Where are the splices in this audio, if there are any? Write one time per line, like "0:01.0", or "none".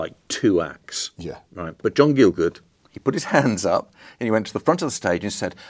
0:01.8